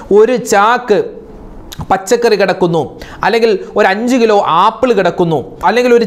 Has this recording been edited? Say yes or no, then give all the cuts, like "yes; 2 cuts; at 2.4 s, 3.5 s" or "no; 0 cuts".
no; 0 cuts